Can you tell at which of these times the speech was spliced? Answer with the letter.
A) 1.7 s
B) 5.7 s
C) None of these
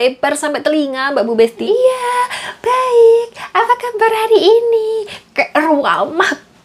A